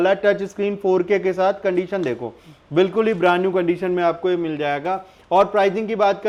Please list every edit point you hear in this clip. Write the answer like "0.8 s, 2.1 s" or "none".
none